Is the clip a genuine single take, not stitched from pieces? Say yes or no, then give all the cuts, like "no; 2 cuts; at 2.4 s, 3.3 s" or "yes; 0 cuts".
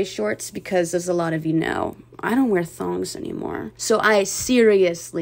no; 1 cut; at 3.7 s